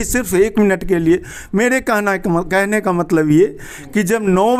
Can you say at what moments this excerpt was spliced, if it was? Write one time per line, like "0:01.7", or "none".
none